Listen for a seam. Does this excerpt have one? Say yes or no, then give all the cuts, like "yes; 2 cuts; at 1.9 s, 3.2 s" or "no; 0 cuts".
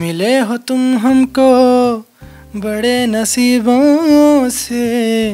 no; 0 cuts